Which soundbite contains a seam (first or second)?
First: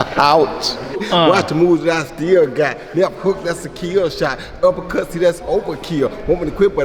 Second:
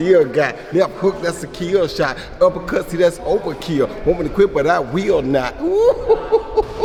first